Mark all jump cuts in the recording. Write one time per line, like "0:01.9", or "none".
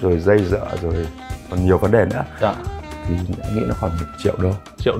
0:04.1